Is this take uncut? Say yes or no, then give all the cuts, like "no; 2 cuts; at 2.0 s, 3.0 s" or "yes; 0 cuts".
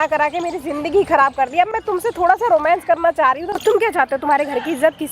no; 1 cut; at 3.6 s